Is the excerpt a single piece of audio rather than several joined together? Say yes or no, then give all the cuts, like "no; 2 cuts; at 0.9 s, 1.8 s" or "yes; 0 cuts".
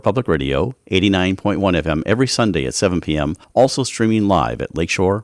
no; 1 cut; at 3.4 s